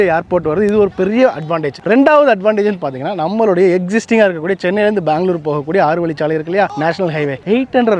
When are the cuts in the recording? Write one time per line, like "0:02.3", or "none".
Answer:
none